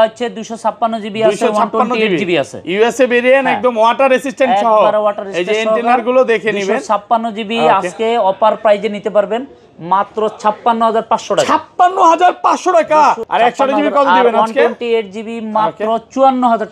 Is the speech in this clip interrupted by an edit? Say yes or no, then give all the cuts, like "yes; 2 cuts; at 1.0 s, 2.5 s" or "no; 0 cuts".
yes; 1 cut; at 13.2 s